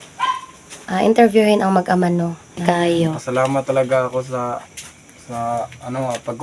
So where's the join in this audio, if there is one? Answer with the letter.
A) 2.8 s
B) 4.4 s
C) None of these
A